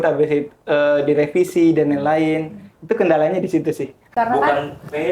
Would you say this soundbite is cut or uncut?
cut